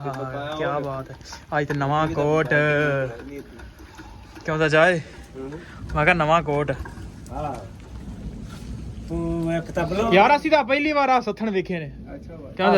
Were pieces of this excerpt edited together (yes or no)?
yes